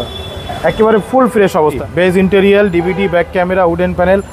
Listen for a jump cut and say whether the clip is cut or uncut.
cut